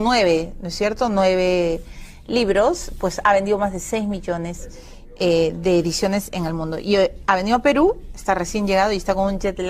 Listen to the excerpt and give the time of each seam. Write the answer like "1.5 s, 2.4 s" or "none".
8.2 s